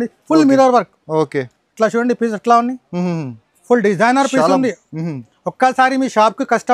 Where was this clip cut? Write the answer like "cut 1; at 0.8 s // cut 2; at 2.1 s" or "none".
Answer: none